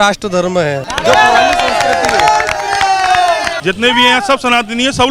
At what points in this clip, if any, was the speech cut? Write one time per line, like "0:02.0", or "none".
0:00.8
0:03.5